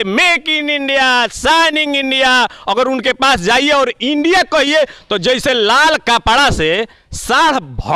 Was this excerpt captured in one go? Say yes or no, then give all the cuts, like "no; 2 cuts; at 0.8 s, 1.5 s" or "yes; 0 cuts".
yes; 0 cuts